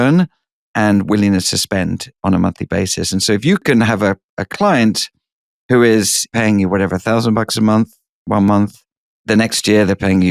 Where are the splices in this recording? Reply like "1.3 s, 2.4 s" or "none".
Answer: 6.3 s

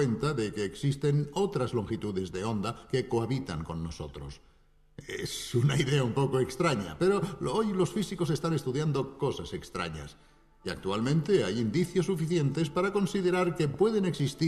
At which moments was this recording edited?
8.2 s

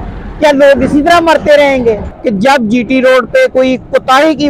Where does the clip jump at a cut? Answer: 2.1 s

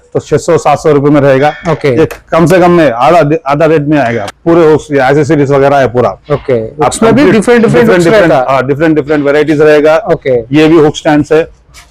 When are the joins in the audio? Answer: 4.2 s

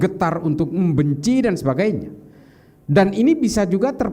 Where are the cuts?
none

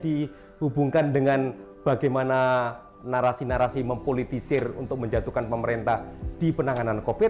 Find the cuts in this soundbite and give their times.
none

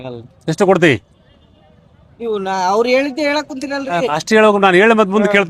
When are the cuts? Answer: none

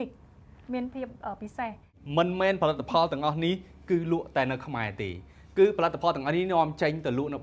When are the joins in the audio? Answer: 1.9 s

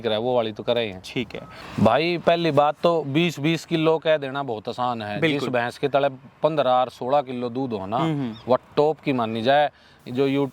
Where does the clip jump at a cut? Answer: 1.6 s

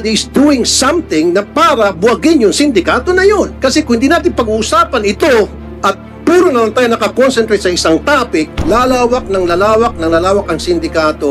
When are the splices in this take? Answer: 3.5 s, 5.7 s, 8.6 s

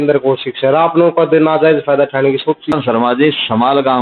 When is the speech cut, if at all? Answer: 2.7 s

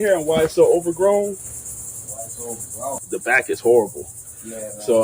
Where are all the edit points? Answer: 2.9 s

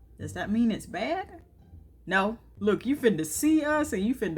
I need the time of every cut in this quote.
2.5 s

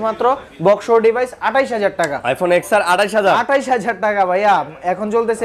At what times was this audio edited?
none

